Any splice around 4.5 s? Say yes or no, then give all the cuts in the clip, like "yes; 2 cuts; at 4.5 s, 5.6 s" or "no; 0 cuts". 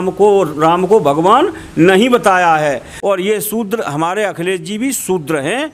no; 1 cut; at 2.9 s